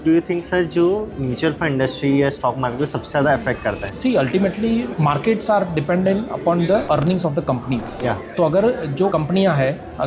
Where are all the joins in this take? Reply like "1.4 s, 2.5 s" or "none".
3.9 s, 6.8 s